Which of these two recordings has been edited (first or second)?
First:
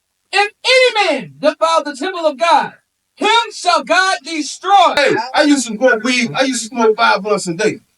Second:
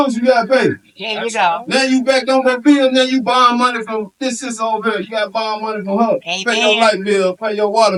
first